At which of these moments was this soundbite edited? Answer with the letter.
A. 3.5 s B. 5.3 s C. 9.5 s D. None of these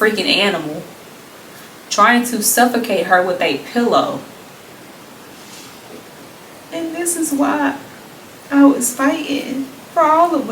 B